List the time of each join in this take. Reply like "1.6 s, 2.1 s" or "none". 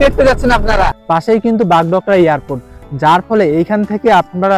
1.0 s